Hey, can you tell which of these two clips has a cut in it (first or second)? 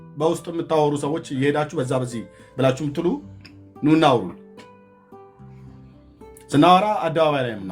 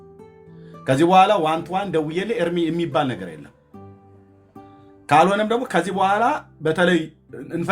second